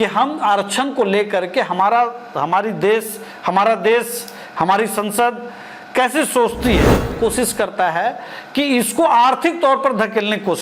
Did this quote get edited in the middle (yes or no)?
yes